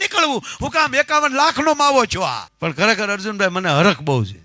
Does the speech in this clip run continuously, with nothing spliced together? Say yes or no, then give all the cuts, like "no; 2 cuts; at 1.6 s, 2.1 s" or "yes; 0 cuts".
no; 1 cut; at 2.5 s